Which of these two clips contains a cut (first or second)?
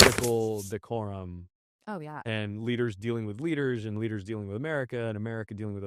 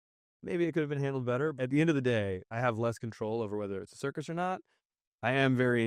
second